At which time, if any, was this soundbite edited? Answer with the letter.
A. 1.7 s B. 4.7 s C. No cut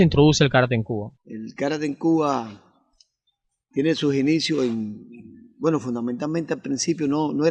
B